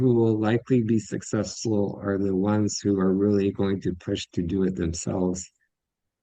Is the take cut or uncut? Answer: uncut